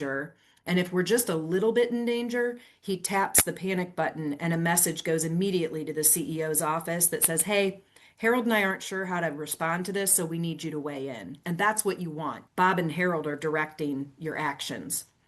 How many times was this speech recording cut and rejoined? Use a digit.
1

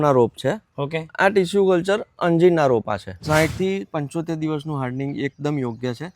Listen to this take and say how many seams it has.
1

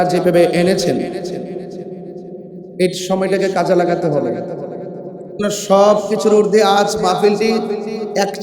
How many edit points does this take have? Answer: 1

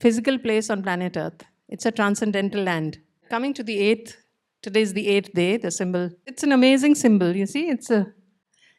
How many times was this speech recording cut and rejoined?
2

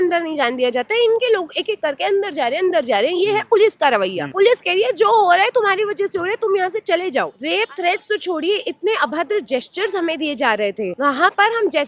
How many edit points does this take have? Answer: 3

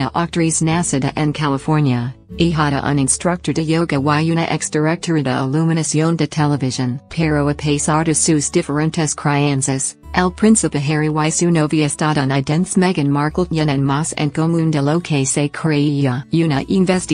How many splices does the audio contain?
1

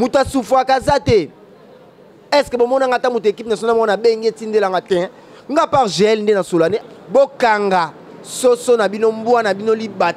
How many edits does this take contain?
1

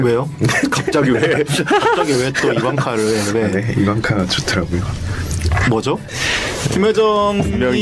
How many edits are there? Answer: 1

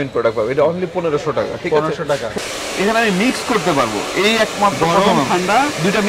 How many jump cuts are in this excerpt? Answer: 1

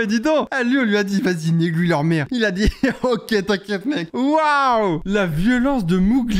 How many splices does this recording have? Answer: 1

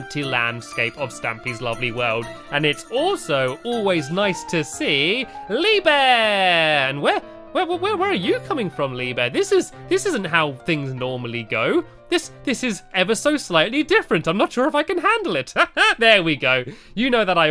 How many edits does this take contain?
1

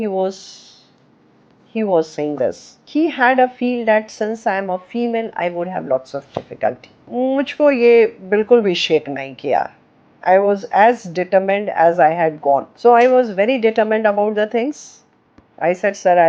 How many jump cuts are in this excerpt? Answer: 3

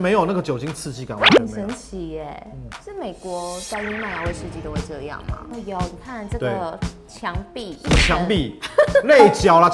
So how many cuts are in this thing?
1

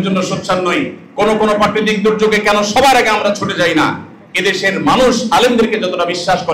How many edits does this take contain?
0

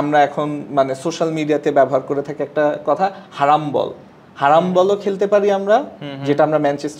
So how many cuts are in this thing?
0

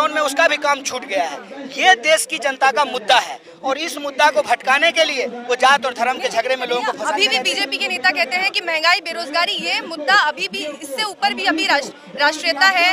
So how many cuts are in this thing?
0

